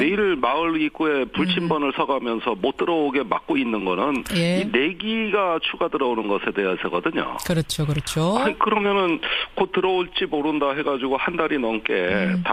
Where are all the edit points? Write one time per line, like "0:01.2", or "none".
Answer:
none

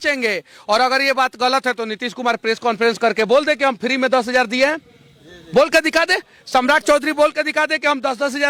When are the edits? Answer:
none

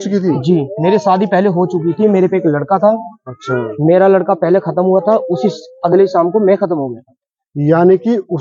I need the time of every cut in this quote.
none

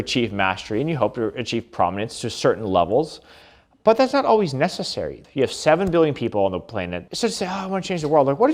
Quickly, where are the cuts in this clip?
0:05.1
0:07.0

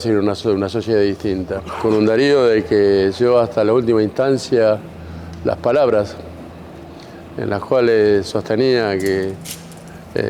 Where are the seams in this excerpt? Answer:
0:01.6

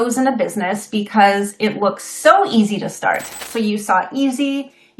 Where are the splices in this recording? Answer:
0:03.3

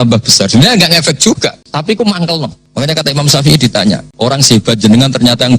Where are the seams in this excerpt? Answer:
0:01.7
0:02.6
0:04.1

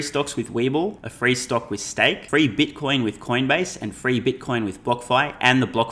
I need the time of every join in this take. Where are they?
0:01.1
0:02.2

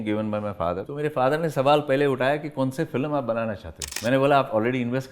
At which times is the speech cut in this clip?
0:00.9
0:03.9

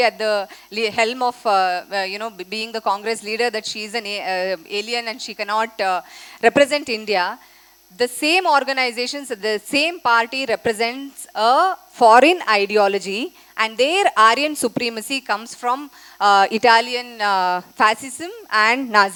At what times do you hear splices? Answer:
none

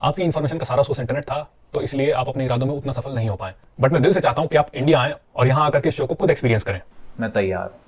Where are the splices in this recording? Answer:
0:07.0

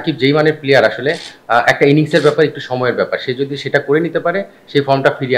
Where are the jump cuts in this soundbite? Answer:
none

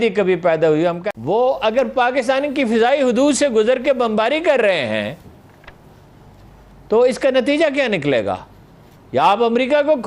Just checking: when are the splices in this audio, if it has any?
0:01.0

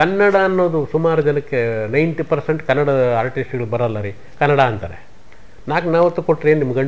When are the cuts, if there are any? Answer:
none

